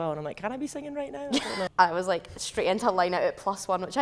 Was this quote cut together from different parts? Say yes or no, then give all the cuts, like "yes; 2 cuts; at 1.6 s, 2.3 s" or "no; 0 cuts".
yes; 1 cut; at 1.6 s